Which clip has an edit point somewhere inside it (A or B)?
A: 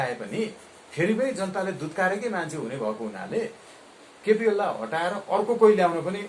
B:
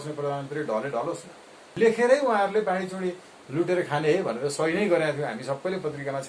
B